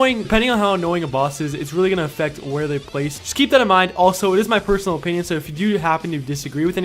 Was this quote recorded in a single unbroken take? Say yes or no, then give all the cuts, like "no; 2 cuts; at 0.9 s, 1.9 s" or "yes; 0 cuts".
no; 1 cut; at 2.2 s